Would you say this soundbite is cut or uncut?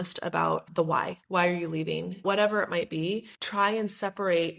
cut